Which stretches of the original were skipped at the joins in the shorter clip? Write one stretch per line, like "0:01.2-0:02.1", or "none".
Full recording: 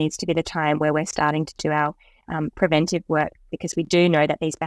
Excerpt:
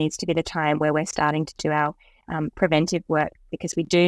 none